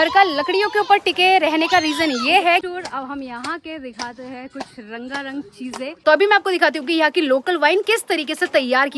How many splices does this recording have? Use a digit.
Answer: 2